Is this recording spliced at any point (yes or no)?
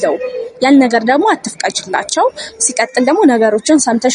no